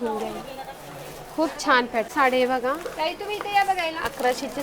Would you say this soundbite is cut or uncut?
cut